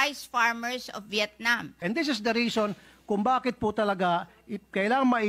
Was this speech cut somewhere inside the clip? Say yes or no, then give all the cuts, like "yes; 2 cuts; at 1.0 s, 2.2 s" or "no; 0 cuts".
yes; 1 cut; at 1.8 s